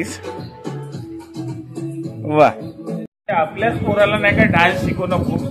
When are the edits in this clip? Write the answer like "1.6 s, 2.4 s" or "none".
3.1 s

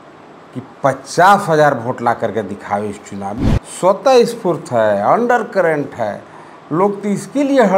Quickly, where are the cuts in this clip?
3.5 s

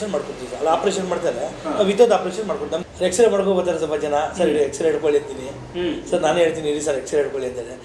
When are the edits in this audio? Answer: 2.7 s

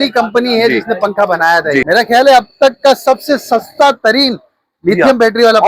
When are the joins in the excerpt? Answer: 1.8 s

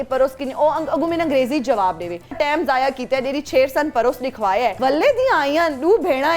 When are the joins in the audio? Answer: 2.3 s, 4.8 s

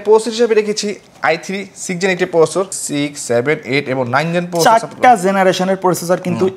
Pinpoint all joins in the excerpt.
2.8 s

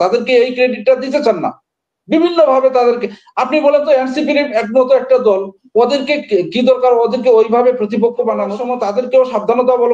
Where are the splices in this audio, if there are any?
8.6 s

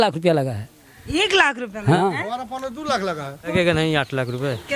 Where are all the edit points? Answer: 2.0 s, 3.5 s

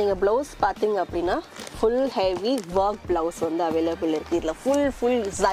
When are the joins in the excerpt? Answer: none

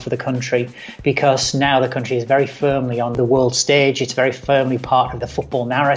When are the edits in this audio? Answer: 3.1 s, 5.2 s

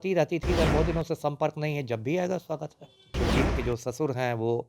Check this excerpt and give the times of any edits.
3.1 s

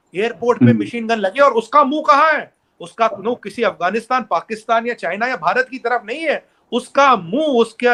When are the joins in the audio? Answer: none

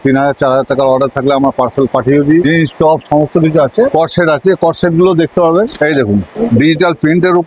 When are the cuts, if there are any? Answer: 2.4 s, 5.7 s

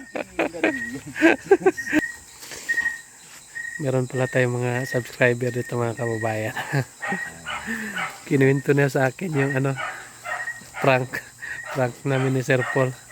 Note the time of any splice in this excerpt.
2.0 s

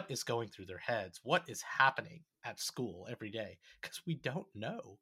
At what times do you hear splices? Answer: none

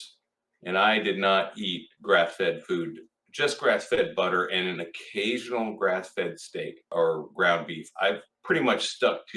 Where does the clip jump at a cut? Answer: 6.8 s, 8.3 s

